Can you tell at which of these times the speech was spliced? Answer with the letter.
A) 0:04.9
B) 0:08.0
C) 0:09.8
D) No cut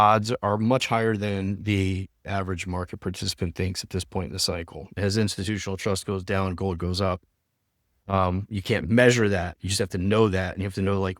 A